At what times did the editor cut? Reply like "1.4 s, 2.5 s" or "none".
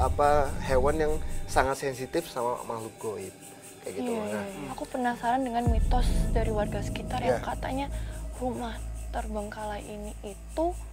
4.6 s